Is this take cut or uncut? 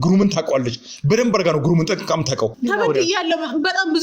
cut